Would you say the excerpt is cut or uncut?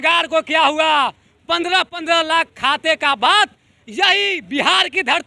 uncut